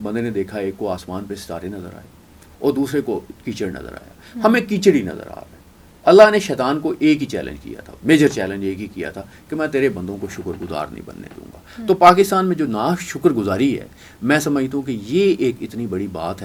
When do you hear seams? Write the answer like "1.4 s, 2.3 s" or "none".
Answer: none